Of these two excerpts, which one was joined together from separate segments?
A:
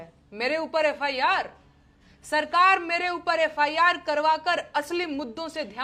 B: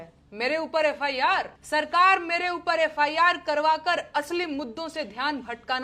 B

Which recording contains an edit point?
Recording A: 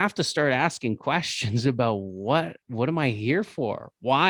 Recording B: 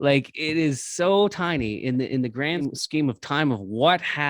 B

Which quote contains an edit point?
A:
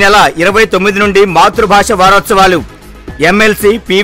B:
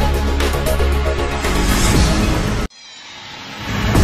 B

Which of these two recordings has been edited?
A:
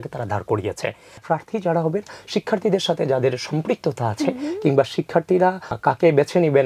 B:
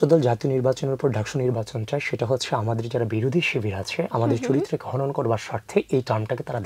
A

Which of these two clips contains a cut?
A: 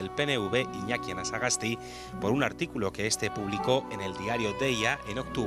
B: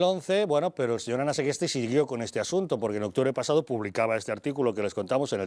B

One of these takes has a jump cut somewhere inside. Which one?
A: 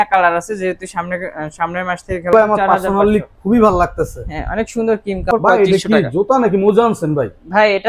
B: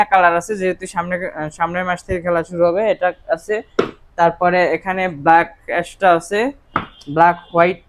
A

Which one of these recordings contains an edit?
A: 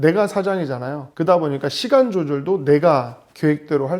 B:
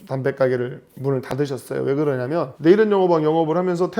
B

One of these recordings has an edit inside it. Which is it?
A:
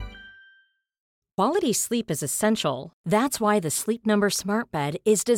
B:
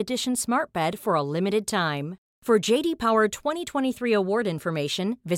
A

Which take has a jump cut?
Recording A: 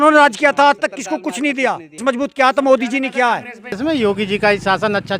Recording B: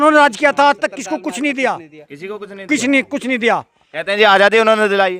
A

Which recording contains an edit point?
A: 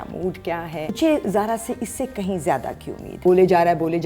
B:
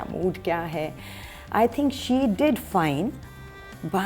A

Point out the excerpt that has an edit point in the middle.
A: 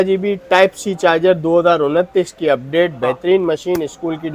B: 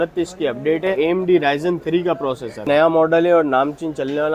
B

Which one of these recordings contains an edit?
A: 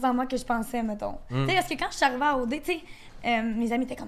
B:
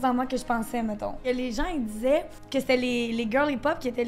B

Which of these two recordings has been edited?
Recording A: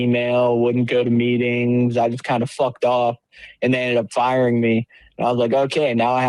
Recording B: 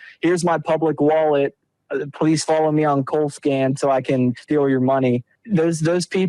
B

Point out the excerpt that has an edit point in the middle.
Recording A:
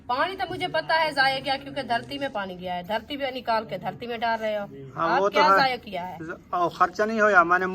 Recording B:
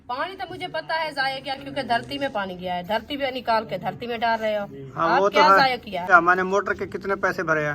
B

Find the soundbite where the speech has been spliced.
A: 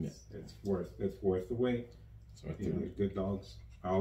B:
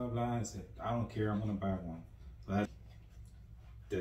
B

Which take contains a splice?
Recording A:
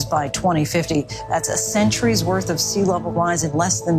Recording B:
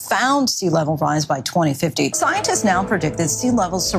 B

